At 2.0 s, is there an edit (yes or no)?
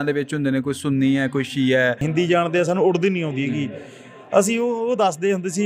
yes